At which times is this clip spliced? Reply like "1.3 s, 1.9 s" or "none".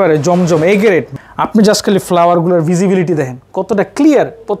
1.1 s